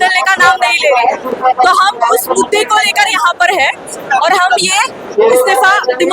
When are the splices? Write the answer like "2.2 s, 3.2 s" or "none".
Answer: none